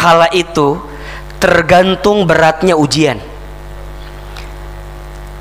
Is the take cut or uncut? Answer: uncut